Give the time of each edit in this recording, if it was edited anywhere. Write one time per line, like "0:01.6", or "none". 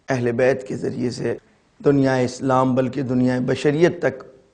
0:01.5